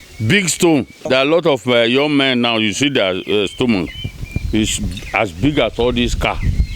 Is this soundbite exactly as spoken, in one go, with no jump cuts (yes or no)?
no